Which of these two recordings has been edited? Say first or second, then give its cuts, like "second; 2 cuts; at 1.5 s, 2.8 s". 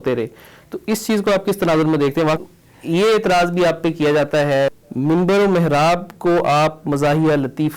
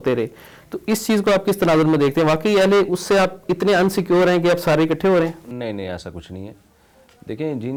first; 2 cuts; at 2.4 s, 4.7 s